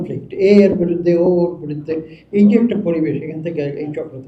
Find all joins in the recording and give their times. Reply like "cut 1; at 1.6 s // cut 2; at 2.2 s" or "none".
none